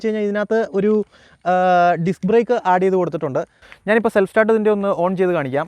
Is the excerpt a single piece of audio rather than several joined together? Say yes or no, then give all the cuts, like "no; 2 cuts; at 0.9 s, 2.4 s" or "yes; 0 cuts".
no; 1 cut; at 3.6 s